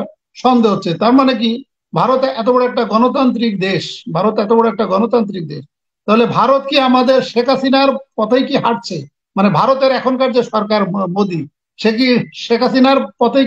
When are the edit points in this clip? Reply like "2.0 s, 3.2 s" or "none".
none